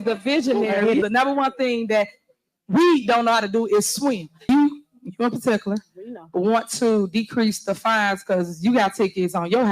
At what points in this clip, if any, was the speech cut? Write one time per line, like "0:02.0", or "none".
0:01.1
0:04.4